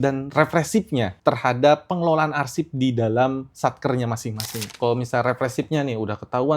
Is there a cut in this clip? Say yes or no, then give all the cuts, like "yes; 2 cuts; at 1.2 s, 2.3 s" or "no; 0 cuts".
yes; 2 cuts; at 1.1 s, 4.8 s